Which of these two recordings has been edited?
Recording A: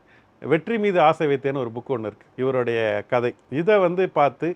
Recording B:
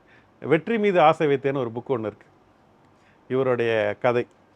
A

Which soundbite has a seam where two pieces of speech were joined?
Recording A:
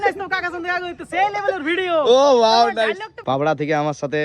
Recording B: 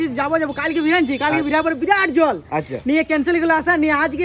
A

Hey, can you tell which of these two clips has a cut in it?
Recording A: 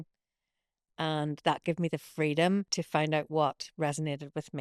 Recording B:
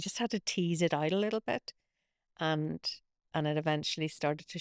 A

